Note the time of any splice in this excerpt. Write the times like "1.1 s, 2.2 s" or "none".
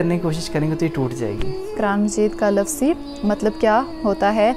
1.8 s